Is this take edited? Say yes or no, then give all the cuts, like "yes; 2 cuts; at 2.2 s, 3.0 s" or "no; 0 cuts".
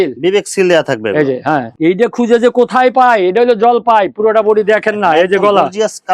yes; 1 cut; at 1.7 s